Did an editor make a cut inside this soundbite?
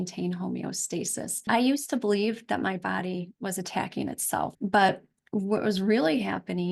yes; 2 cuts; at 1.4 s, 4.5 s

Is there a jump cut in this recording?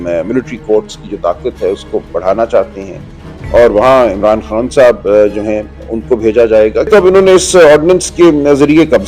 yes; 1 cut; at 6.9 s

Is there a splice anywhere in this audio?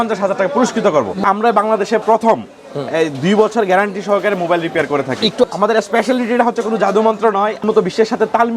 yes; 3 cuts; at 1.2 s, 5.4 s, 7.6 s

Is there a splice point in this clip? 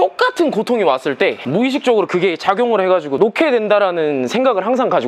yes; 2 cuts; at 1.4 s, 3.1 s

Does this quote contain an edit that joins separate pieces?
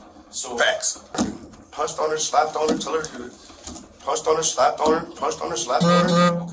yes; 1 cut; at 1.1 s

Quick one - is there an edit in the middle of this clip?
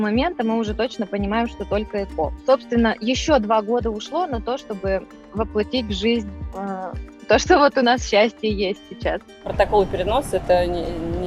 no; 0 cuts

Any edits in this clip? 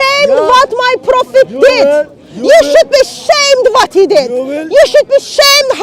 no; 0 cuts

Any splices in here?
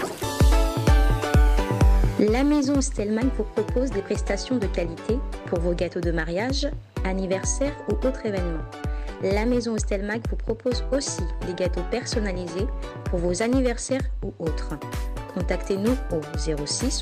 no; 0 cuts

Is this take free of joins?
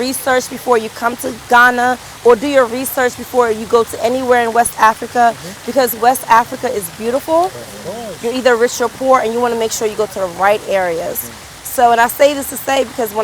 yes; 0 cuts

